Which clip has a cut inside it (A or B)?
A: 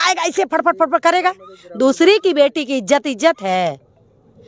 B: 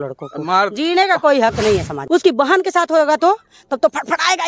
B